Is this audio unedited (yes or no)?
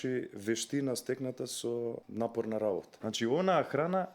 no